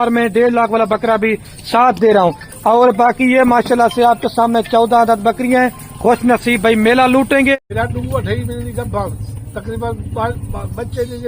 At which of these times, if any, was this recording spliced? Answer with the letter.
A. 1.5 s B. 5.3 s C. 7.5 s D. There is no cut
C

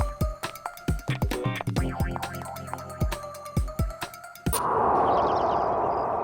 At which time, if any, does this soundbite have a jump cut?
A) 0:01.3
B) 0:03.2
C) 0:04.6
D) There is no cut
C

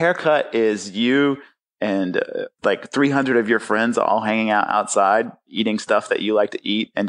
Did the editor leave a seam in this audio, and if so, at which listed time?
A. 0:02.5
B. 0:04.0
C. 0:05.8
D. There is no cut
A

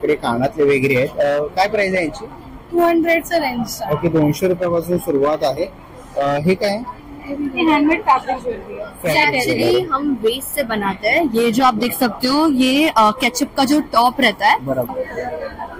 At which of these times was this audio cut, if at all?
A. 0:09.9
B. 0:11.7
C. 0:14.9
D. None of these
C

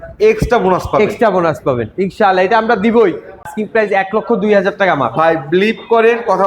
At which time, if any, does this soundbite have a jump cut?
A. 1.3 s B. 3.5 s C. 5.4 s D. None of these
B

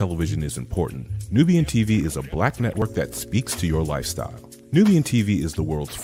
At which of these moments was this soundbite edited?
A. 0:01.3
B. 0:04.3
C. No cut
C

